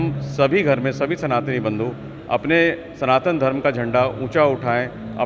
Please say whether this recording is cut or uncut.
uncut